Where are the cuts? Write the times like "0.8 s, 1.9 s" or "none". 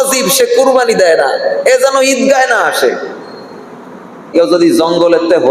4.3 s